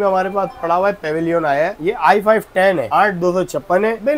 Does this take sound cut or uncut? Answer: cut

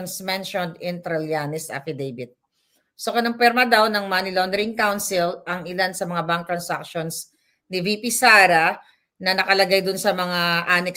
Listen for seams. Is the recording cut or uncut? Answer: uncut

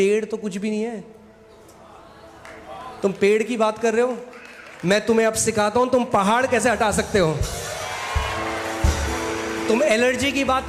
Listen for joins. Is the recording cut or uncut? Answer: uncut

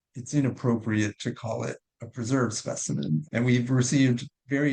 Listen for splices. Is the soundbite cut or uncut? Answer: uncut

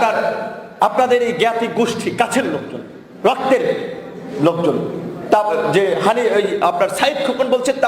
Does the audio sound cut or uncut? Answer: uncut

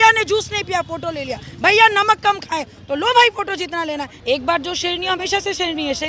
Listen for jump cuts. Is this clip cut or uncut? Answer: cut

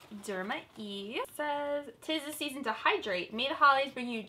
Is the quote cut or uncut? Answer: cut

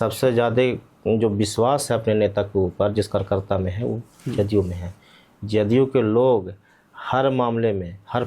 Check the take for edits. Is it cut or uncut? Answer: uncut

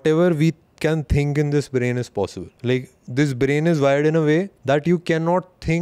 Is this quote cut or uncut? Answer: cut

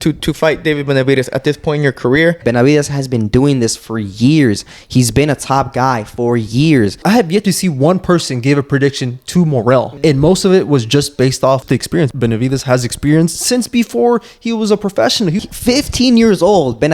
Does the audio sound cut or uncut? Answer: cut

